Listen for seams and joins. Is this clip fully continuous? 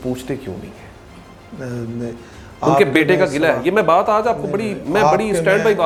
yes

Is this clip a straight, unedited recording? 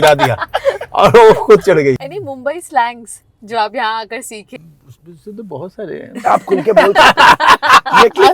no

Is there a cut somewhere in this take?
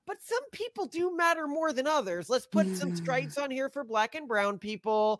no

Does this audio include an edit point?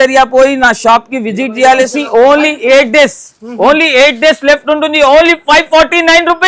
yes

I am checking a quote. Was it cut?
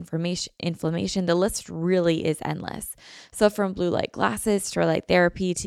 no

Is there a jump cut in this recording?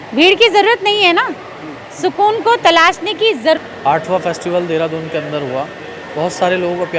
yes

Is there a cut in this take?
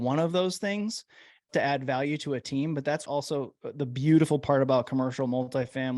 yes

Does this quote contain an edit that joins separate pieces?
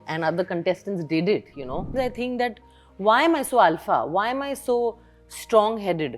yes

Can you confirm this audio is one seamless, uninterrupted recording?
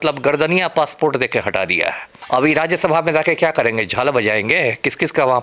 no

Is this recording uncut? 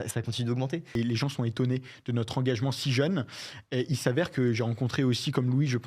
no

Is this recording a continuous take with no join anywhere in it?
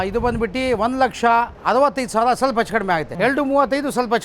no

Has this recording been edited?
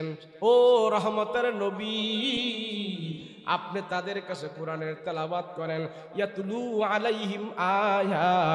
no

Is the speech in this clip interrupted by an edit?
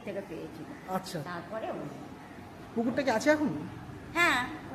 yes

